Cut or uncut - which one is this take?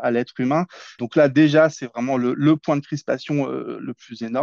cut